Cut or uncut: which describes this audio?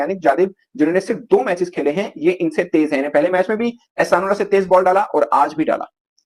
uncut